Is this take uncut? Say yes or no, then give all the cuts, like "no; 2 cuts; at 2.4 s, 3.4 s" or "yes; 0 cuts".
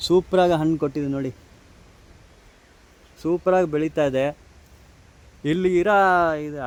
yes; 0 cuts